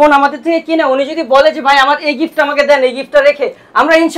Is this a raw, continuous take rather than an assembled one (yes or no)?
yes